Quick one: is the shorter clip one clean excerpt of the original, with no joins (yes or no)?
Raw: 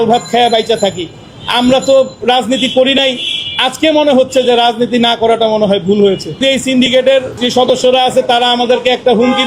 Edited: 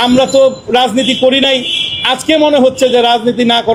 yes